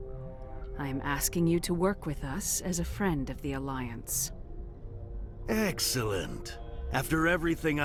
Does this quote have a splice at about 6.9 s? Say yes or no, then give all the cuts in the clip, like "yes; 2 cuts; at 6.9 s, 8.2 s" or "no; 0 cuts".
no; 0 cuts